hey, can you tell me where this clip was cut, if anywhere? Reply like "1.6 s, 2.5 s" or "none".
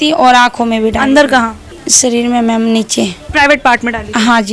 3.2 s